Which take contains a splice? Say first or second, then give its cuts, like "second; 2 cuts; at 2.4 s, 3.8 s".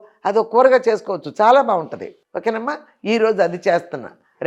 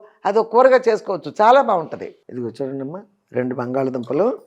second; 1 cut; at 2.2 s